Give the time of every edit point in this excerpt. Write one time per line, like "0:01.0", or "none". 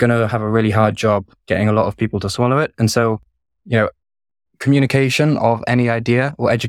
none

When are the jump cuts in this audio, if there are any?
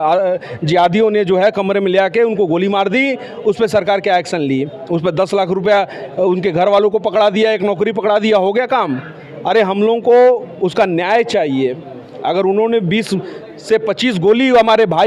none

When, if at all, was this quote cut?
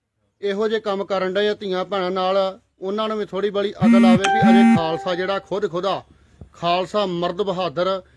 none

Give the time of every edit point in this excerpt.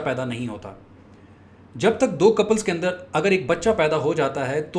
none

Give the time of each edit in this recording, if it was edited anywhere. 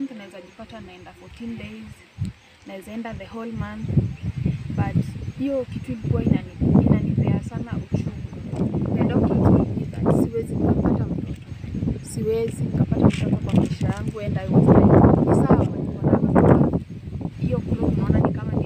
0:08.6
0:15.9

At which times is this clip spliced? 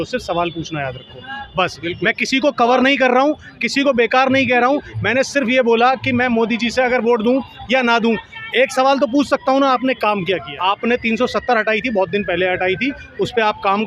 0:10.5

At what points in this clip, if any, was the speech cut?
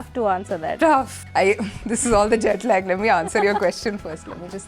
0:01.2

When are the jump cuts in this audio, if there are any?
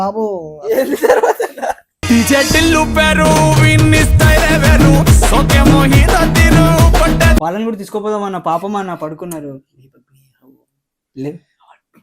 0:07.5

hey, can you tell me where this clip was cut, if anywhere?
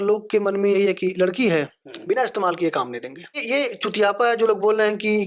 0:03.4

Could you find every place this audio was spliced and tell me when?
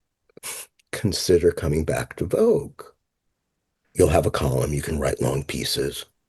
0:03.8

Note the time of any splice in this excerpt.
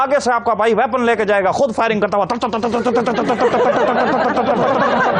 none

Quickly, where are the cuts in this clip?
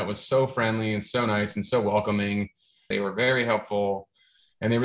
0:02.9

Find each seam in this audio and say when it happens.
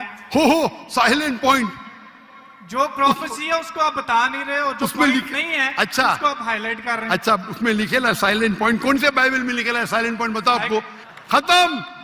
0:11.0

